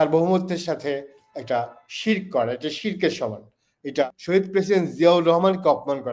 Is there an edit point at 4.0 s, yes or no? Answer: yes